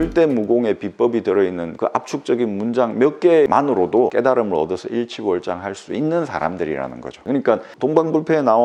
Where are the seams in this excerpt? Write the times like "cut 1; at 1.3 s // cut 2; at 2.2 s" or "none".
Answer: none